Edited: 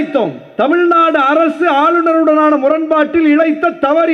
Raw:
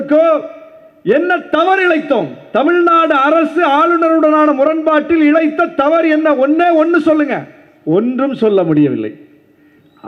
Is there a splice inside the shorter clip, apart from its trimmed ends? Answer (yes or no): no